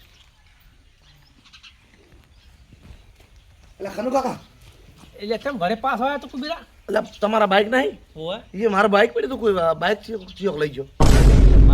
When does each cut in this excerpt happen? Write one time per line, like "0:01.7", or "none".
0:10.8